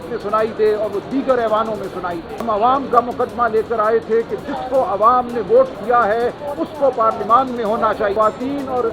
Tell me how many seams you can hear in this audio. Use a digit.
2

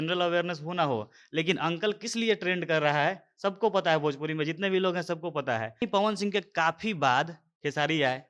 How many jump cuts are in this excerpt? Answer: 1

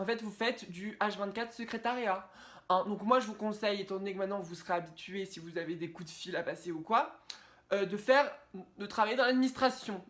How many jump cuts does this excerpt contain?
0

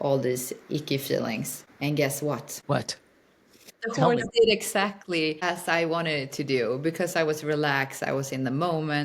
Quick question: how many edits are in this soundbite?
4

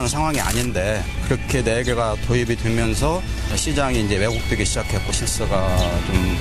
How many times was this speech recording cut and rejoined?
1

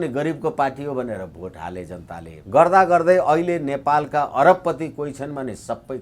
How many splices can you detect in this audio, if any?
1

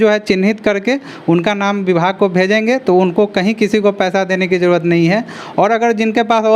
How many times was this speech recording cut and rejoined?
0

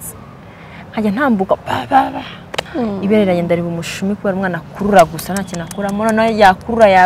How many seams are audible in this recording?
1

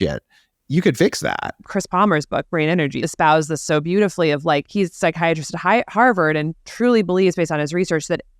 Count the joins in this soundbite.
3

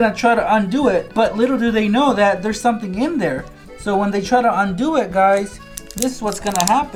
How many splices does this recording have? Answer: 0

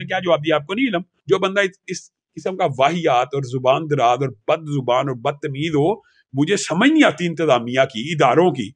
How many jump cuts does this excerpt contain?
1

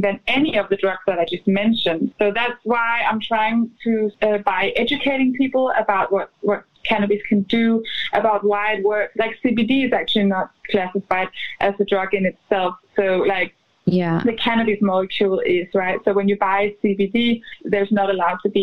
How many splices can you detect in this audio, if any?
4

